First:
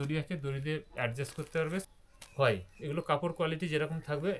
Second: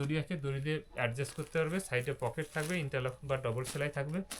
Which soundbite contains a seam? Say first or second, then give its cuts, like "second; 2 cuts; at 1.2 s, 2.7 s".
first; 1 cut; at 1.9 s